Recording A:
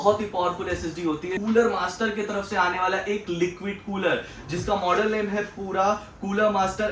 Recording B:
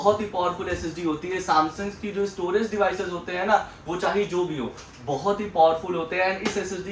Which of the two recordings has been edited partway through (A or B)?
A